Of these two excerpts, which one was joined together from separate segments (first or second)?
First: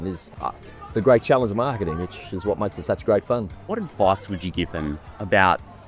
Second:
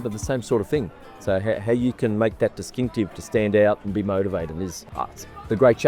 first